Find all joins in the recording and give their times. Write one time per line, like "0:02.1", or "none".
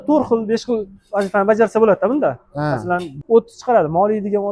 0:03.1